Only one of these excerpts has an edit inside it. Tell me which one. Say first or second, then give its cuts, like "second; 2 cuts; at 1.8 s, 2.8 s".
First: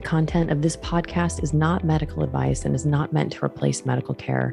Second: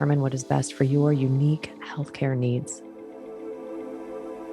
second; 1 cut; at 2.7 s